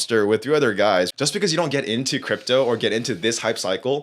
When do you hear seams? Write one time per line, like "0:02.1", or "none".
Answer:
0:01.1

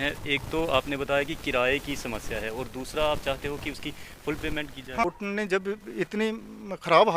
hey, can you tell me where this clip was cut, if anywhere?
0:05.1

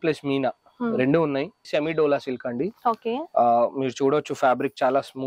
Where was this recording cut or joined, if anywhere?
0:01.6

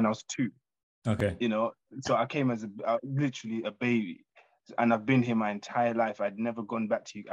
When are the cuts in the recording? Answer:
none

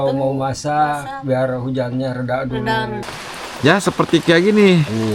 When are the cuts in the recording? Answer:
0:03.1

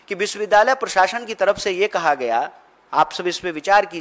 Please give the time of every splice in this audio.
none

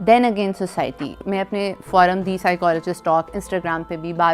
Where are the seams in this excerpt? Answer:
0:01.1

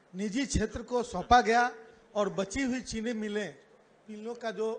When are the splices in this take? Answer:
none

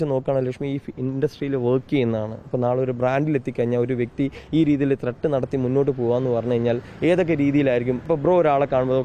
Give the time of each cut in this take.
none

